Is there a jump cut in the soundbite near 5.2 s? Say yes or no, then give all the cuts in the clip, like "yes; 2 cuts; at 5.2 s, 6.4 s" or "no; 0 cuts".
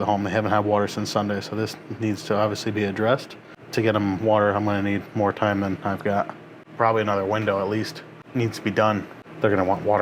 no; 2 cuts; at 3.5 s, 8.2 s